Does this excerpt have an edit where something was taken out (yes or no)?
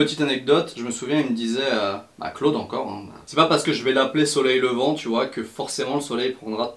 yes